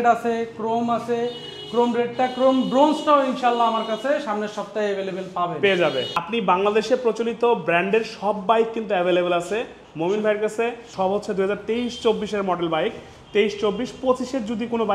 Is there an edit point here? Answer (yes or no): yes